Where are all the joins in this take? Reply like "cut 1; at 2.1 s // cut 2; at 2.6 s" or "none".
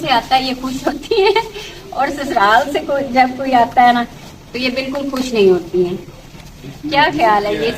none